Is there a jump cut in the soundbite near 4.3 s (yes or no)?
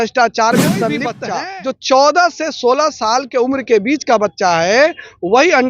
no